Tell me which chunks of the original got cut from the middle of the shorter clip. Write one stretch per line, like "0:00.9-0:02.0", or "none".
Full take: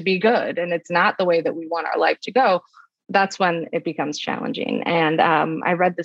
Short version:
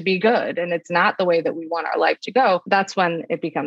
0:02.6-0:03.1

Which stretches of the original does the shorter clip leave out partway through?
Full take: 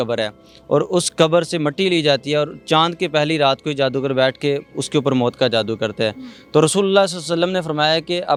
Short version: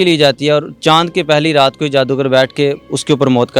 none

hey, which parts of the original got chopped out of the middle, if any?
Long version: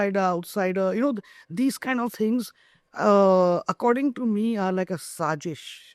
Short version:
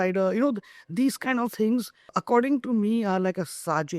0:02.8-0:03.7

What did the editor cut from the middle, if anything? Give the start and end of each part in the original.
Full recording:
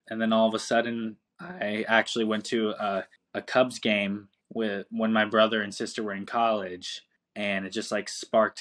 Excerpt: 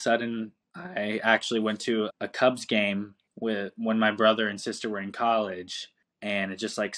0:02.8-0:03.3

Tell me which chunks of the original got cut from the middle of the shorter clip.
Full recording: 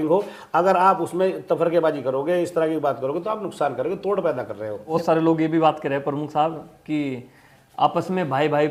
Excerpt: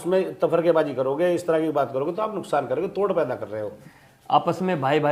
0:04.8-0:07.2

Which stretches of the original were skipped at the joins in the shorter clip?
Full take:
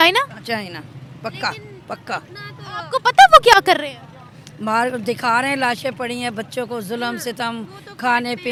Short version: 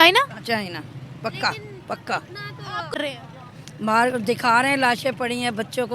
0:03.0-0:03.8

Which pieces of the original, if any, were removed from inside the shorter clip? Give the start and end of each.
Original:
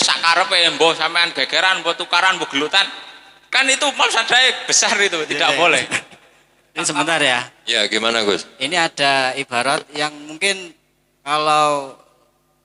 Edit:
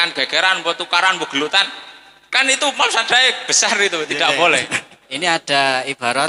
0:06.2-0:08.5

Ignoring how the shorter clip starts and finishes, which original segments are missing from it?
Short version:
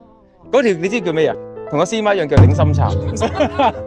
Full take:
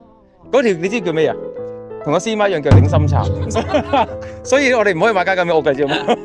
0:01.5-0:01.9

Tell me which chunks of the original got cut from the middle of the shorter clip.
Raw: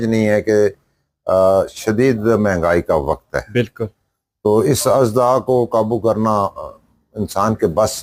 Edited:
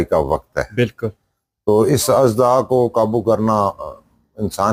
none

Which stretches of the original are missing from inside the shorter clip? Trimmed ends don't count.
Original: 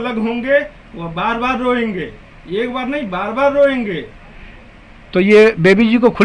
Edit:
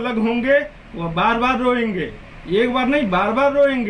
none

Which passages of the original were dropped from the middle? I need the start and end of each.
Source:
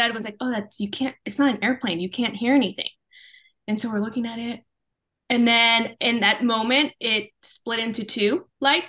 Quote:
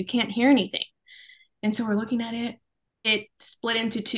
0:05.1-0:07.1

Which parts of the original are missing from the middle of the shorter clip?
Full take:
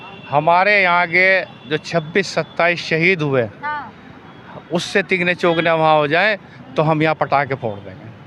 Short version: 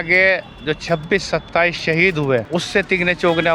0:03.5-0:04.7

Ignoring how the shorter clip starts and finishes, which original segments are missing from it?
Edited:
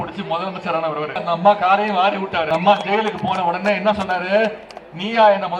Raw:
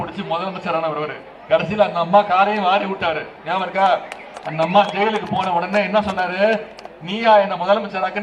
0:01.2-0:01.9
0:03.2-0:04.6

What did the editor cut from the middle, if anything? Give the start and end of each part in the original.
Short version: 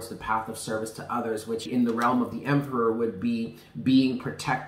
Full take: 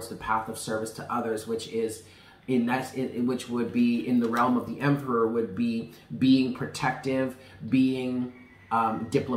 0:01.7-0:04.0

